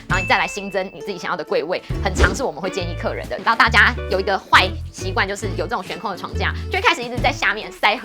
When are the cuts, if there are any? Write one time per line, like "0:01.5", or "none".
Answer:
0:03.4